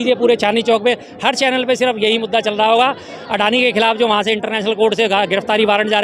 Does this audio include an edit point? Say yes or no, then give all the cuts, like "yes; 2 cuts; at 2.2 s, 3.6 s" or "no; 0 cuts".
no; 0 cuts